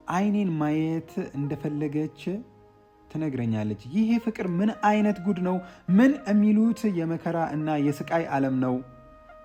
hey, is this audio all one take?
yes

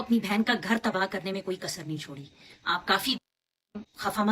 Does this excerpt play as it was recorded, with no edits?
no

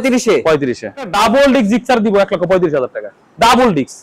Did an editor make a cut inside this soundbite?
yes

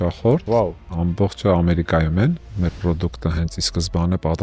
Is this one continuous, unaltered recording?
no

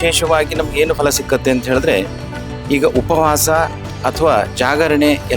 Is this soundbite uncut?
yes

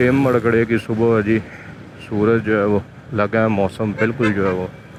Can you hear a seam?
no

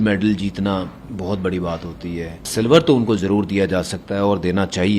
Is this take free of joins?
no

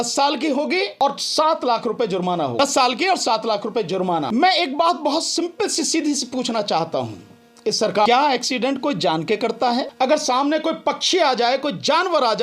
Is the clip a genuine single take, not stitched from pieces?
no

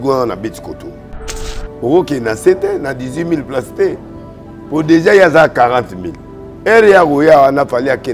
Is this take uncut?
no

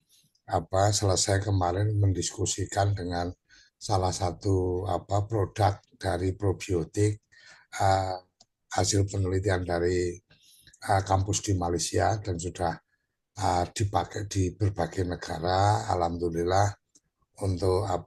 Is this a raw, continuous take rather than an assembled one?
yes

